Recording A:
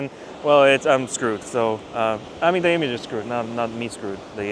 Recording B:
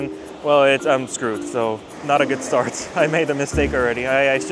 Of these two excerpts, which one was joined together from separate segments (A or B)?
B